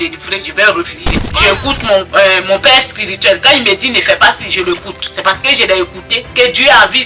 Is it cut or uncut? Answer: cut